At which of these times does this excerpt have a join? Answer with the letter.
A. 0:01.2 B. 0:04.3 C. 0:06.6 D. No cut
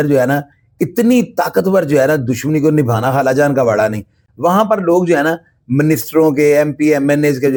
D